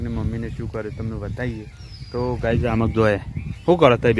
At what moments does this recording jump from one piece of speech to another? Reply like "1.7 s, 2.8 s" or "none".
none